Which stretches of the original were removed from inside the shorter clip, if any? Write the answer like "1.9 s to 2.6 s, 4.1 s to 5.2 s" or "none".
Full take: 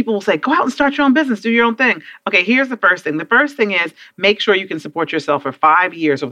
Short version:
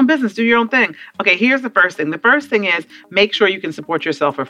none

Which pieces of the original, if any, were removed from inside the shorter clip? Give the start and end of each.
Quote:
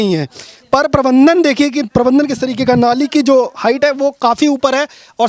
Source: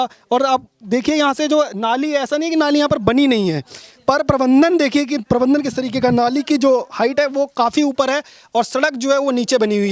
none

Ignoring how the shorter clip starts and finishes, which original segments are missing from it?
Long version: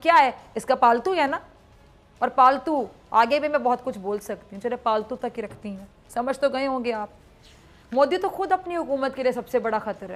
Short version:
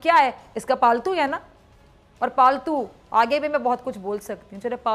none

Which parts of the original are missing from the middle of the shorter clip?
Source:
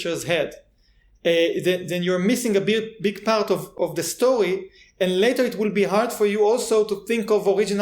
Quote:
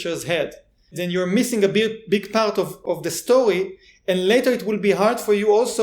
1.0 s to 1.9 s

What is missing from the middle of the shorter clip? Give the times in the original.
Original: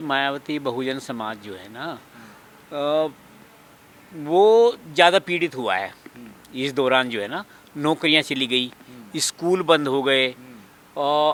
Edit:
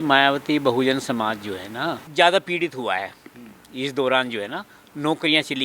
2.0 s to 4.8 s

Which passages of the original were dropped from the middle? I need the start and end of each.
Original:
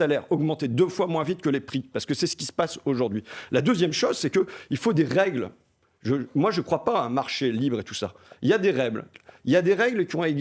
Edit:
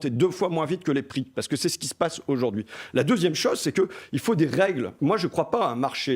5.5 s to 6.3 s

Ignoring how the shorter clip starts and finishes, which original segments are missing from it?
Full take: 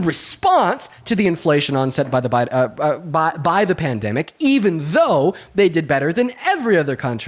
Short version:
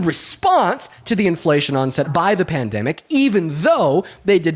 2.1 s to 3.4 s

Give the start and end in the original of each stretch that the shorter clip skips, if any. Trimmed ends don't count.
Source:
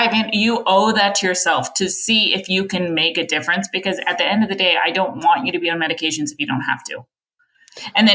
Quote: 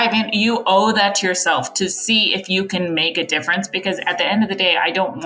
none

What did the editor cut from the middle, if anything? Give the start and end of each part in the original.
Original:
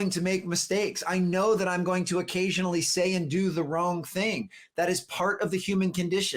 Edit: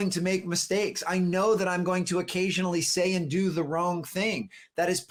none

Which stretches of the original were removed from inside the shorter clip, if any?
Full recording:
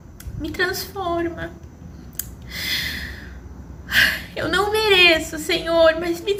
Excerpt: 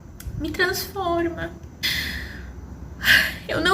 1.8 s to 2.7 s

